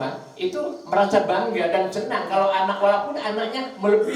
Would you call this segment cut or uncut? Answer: uncut